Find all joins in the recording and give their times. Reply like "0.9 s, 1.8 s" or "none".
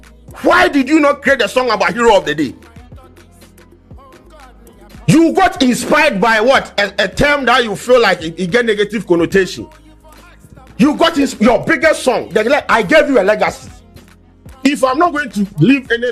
none